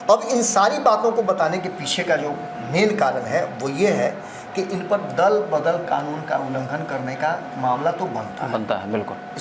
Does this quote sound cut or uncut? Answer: uncut